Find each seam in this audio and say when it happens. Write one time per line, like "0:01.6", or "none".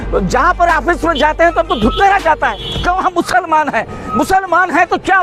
none